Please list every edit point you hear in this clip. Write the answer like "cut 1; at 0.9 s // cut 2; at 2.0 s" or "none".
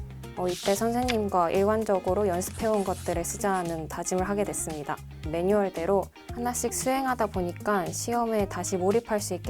cut 1; at 5.2 s // cut 2; at 6.2 s